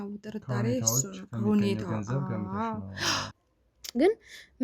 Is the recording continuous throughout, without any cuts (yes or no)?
no